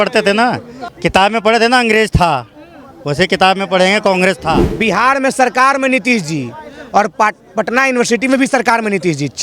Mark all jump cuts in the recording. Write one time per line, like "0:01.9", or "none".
0:04.7